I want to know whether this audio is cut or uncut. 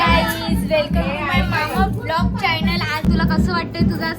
cut